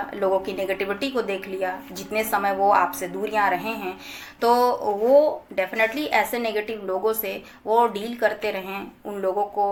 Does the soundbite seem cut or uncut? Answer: uncut